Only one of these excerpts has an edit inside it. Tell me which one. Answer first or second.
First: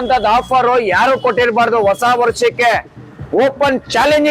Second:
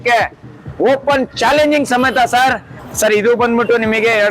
second